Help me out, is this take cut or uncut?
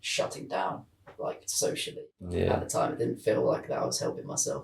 cut